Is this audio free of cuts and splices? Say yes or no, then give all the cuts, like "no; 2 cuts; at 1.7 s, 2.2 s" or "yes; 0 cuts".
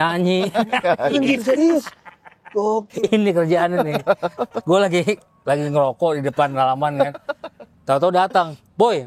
yes; 0 cuts